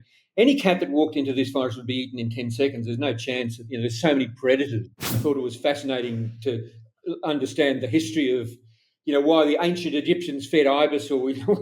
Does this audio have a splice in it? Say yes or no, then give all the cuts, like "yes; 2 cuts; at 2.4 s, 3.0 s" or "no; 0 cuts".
yes; 1 cut; at 5.2 s